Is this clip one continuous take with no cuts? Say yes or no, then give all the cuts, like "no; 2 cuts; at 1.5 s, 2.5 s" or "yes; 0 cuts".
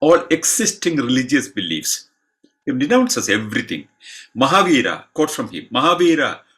yes; 0 cuts